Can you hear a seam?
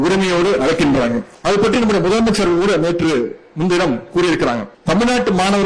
yes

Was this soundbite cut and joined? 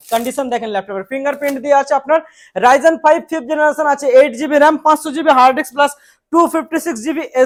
no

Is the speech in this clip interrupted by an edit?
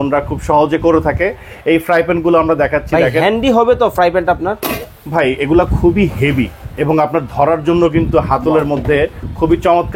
no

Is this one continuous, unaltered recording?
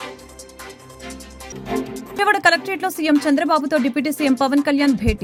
yes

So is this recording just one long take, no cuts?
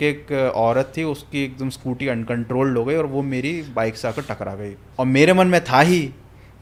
yes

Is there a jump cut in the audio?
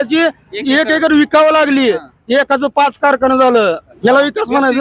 yes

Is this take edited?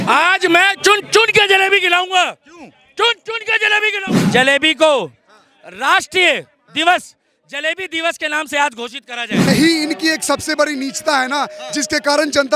yes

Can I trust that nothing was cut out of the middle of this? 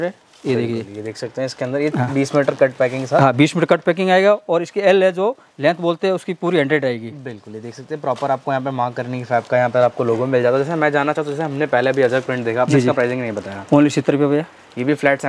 yes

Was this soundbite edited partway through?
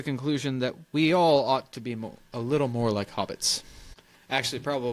no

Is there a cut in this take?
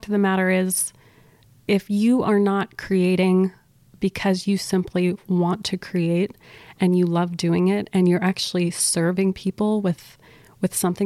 no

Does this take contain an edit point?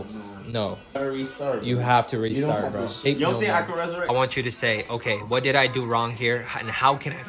yes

